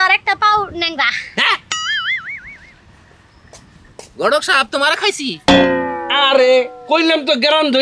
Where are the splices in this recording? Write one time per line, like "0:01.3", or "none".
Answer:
none